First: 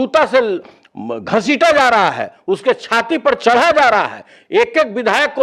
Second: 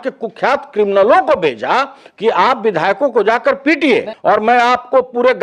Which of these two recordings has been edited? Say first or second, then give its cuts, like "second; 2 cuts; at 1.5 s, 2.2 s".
second; 1 cut; at 4.1 s